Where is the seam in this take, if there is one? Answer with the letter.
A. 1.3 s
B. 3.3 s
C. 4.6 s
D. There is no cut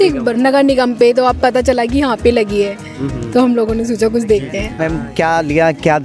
C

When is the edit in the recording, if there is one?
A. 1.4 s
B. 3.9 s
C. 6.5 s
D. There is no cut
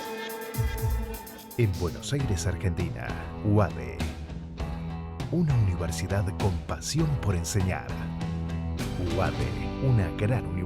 A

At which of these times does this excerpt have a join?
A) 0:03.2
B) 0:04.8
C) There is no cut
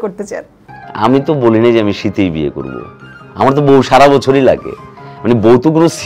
C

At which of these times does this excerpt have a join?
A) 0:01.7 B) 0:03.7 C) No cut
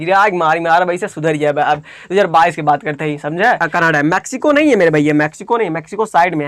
B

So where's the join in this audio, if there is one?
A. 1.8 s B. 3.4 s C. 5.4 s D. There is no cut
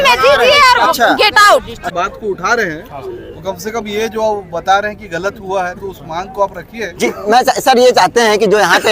A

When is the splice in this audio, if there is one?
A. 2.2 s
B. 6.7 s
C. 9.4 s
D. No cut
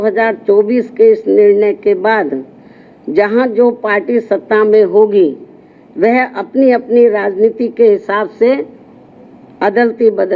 D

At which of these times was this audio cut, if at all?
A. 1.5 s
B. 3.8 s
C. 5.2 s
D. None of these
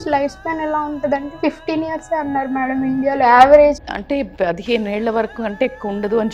B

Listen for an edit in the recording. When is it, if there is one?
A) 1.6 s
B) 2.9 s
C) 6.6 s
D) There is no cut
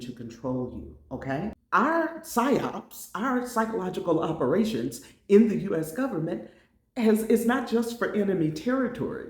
A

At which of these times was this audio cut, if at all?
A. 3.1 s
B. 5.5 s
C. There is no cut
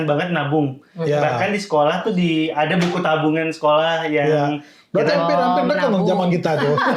C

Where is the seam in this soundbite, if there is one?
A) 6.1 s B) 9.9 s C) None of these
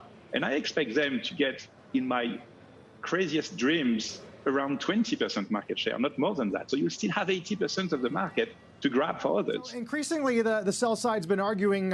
B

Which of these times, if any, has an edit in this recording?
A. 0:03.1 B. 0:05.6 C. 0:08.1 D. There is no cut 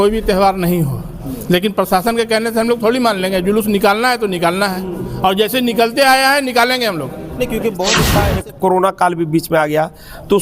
C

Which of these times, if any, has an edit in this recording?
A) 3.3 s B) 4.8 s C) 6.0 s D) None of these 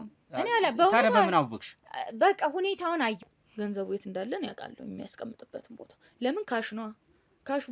A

